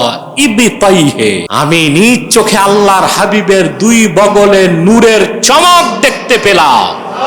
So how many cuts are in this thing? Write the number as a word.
one